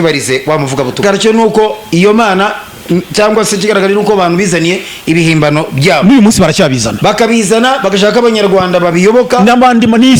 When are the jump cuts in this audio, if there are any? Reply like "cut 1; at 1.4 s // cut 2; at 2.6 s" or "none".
cut 1; at 1.0 s